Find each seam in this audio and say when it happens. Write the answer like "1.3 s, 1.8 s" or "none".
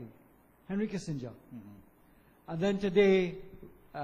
1.2 s